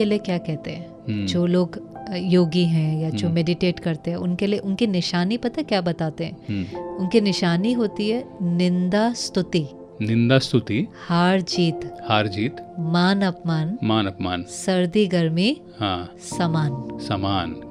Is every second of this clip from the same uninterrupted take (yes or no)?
yes